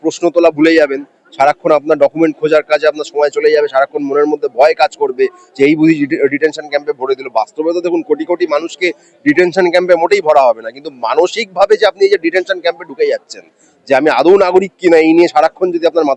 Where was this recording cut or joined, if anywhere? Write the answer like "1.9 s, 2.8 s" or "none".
none